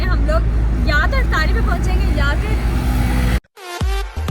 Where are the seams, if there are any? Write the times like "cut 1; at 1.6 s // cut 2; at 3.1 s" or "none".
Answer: none